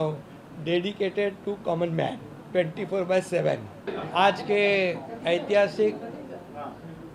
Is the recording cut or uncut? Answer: cut